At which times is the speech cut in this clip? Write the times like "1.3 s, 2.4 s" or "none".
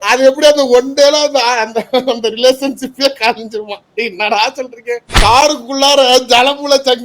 5.1 s